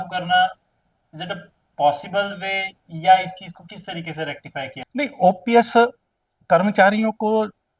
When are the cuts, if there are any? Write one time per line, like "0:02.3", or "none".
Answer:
0:04.8